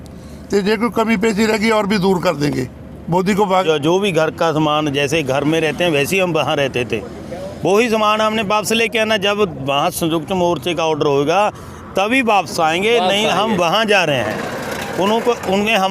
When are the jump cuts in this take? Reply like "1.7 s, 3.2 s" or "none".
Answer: 3.6 s

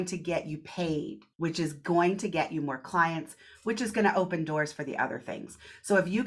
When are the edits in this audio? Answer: 1.2 s

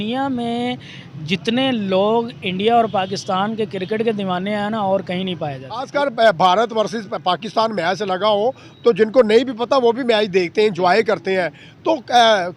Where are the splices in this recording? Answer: 5.9 s

